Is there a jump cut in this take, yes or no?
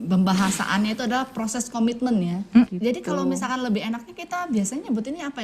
yes